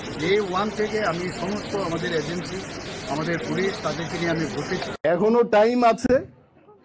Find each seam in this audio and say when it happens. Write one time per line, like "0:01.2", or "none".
0:04.9